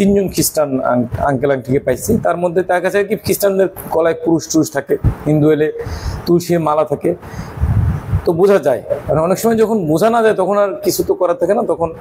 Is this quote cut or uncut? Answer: uncut